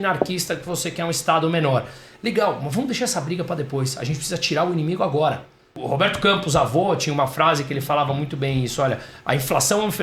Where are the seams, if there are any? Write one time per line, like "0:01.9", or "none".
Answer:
0:05.8